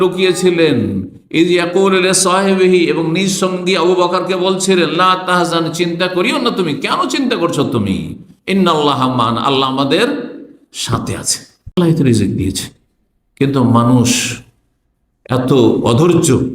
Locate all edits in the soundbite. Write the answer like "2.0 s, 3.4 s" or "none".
11.8 s